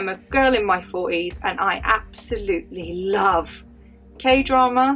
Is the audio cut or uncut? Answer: cut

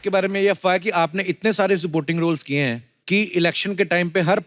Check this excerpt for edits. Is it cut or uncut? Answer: cut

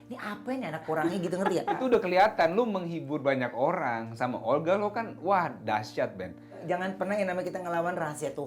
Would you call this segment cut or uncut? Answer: cut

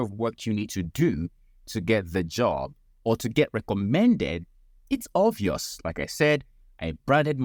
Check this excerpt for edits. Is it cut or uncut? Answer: uncut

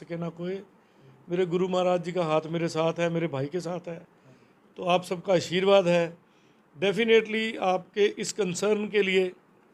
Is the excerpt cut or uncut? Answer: uncut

